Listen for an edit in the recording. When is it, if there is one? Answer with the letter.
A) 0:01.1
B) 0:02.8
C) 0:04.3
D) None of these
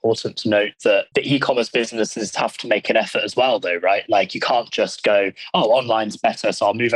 A